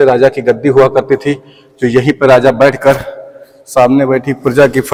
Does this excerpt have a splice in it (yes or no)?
no